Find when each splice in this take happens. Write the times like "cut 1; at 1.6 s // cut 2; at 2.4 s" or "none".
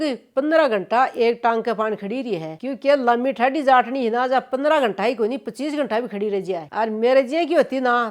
none